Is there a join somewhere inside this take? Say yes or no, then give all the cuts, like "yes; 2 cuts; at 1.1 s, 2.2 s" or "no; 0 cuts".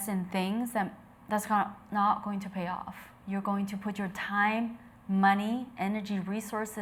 no; 0 cuts